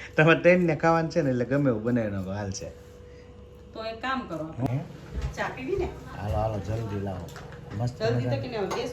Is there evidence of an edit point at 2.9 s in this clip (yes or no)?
no